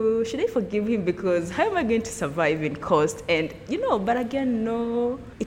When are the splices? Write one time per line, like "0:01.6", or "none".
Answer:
none